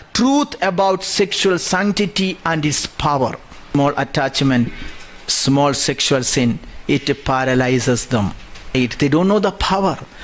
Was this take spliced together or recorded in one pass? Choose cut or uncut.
cut